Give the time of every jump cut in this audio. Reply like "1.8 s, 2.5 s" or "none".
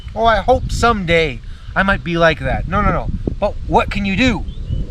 3.6 s